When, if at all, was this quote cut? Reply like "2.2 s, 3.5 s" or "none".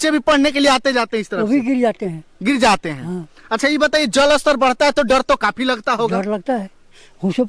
none

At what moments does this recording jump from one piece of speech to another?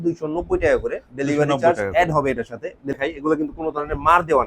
3.0 s

